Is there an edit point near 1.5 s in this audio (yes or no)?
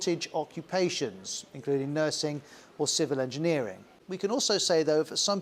no